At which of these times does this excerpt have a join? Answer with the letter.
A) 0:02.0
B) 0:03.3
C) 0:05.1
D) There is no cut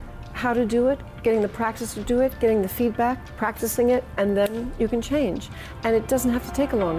B